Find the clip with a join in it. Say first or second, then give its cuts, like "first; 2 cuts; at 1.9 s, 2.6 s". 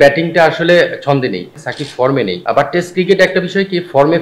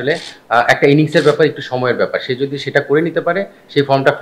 first; 2 cuts; at 1.5 s, 2.4 s